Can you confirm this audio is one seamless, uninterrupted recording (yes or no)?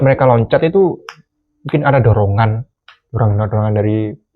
yes